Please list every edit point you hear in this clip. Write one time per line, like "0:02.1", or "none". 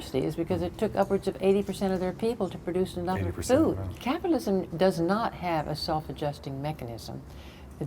0:04.0